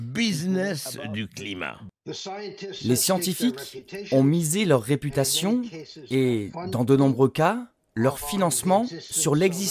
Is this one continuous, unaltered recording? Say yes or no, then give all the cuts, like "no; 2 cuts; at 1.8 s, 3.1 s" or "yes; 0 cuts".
no; 1 cut; at 1.8 s